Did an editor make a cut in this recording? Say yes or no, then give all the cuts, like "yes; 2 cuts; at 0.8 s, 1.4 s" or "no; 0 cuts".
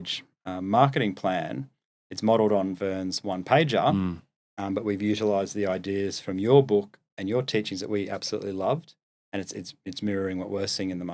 no; 0 cuts